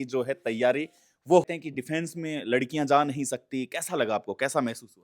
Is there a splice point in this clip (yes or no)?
yes